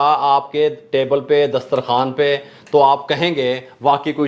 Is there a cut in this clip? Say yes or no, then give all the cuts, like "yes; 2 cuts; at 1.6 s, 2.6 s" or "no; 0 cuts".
no; 0 cuts